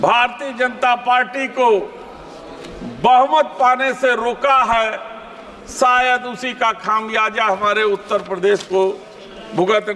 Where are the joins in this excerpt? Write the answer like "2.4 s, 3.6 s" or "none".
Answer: none